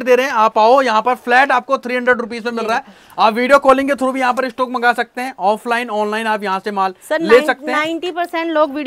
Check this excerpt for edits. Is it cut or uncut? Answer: uncut